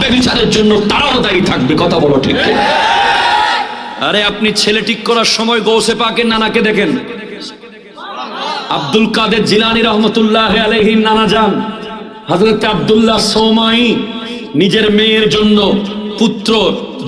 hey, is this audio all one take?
no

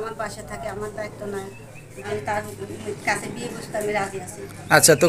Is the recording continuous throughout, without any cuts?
no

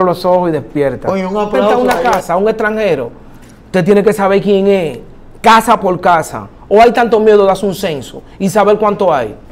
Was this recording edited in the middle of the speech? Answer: yes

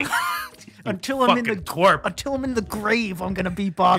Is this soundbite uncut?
yes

